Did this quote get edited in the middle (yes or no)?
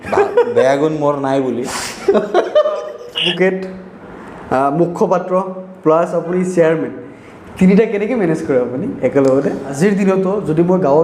yes